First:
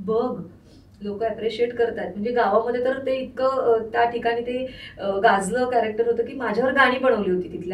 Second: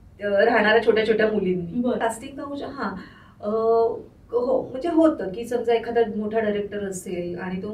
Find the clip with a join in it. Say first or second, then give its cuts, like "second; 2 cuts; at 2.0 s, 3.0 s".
second; 1 cut; at 2.0 s